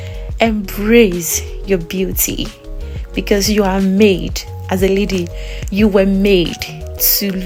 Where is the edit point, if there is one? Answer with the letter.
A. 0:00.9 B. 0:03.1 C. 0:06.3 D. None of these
D